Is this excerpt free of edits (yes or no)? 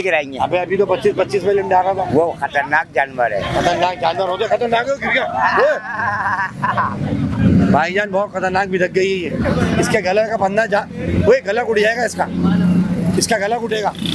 yes